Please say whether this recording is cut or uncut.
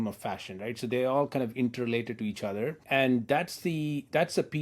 cut